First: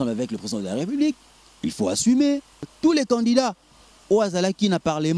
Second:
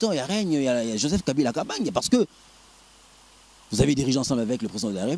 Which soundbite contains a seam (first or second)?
first